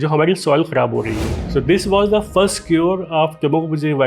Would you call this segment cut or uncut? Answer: cut